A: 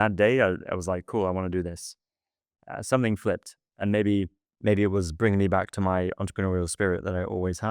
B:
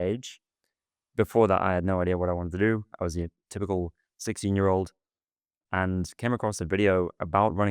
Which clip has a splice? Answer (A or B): A